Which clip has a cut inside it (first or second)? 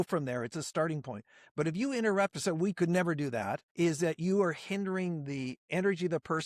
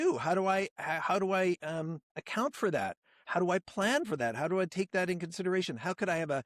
first